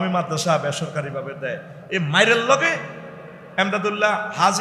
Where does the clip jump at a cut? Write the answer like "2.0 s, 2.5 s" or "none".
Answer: none